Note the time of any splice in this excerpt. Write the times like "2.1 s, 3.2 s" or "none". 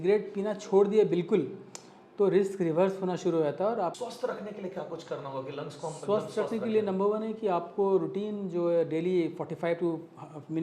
4.0 s